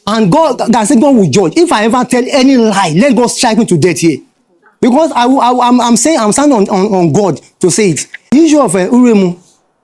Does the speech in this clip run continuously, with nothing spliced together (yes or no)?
no